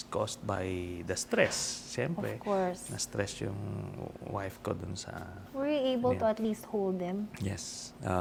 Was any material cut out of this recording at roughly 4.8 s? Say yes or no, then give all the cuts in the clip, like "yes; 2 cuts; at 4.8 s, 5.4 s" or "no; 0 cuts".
no; 0 cuts